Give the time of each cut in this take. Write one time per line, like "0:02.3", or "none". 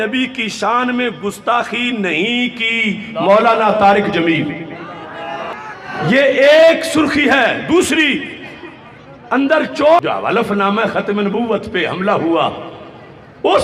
0:10.0

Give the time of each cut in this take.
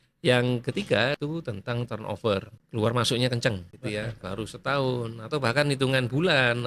0:01.2
0:02.6
0:03.7

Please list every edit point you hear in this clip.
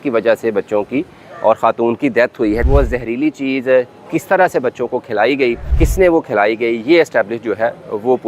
0:02.6
0:05.7

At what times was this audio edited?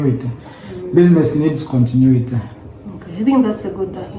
none

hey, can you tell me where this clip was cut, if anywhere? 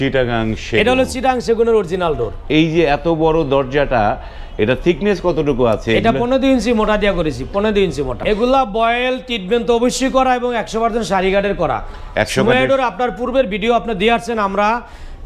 0:02.4
0:08.2

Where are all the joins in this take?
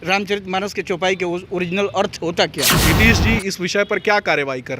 0:02.8

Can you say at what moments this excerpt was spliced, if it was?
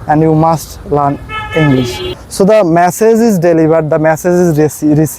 0:02.2

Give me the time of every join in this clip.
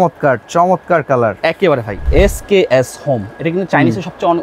0:01.9

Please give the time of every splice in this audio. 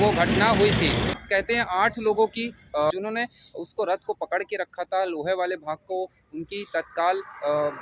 0:01.1
0:02.9

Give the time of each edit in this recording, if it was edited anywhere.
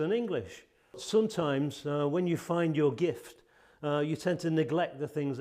0:01.0

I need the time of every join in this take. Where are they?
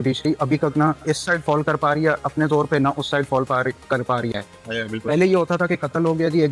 0:01.0
0:04.3

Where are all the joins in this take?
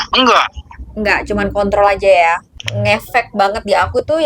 0:02.6

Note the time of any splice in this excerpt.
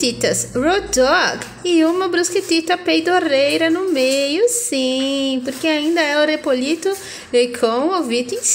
none

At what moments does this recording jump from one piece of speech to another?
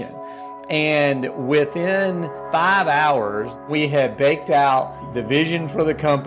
0:02.3
0:03.6
0:05.1

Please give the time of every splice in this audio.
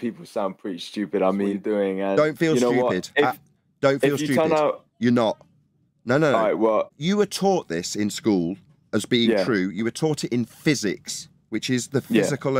0:01.6
0:07.0

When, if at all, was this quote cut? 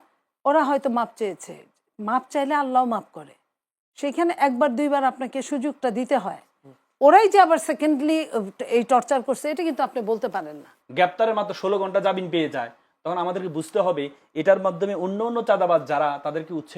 0:10.8

